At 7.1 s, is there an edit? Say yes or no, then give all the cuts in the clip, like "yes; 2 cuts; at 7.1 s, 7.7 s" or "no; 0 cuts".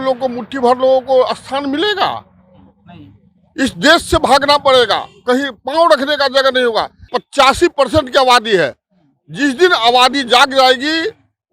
yes; 1 cut; at 7.1 s